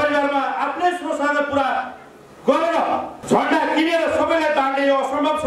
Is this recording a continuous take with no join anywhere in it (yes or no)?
no